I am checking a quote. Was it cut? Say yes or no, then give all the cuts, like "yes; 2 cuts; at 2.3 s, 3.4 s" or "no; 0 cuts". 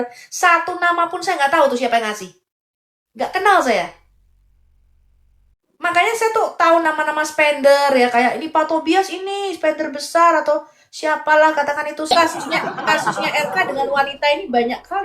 yes; 1 cut; at 12.1 s